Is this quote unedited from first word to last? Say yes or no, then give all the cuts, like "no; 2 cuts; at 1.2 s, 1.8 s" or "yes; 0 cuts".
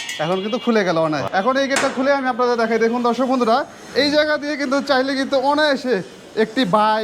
no; 1 cut; at 1.2 s